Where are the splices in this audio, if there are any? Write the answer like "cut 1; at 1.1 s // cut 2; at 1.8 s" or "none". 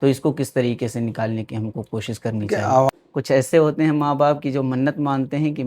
cut 1; at 2.9 s